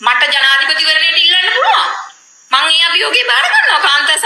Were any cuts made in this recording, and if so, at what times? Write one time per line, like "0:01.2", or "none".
0:02.3